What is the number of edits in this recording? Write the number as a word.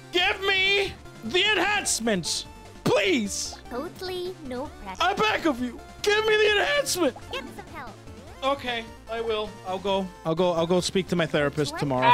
three